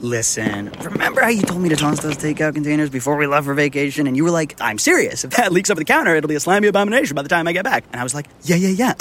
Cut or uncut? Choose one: uncut